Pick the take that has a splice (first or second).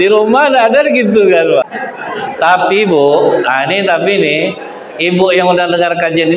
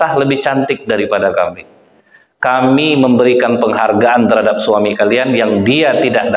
first